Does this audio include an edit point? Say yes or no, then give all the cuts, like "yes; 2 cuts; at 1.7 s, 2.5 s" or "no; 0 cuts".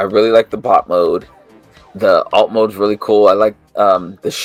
no; 0 cuts